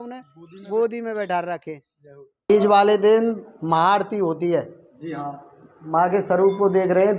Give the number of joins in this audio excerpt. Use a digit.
1